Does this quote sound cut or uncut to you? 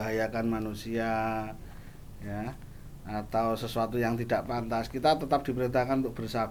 uncut